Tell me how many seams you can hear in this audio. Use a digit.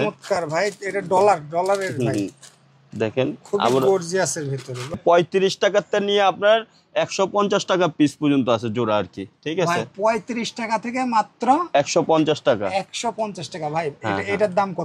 1